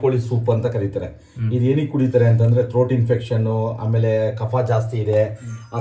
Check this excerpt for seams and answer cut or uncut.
uncut